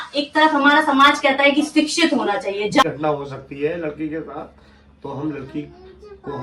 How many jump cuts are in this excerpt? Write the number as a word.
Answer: one